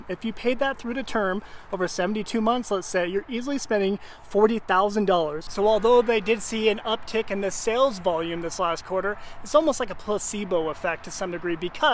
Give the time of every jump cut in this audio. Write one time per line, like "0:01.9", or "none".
0:05.4